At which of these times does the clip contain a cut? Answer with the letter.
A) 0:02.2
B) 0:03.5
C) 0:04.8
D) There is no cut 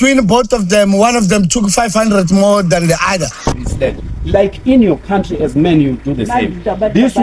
B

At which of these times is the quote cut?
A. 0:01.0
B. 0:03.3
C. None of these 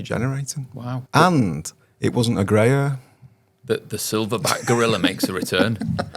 A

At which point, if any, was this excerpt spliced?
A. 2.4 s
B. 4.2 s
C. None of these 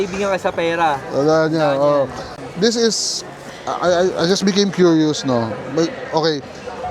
A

